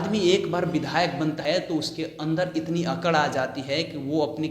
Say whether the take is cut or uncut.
cut